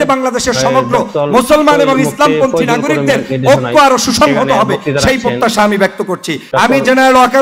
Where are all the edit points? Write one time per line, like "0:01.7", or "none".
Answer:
0:06.4